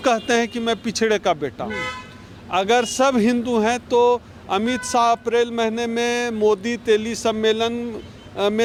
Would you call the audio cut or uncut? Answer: uncut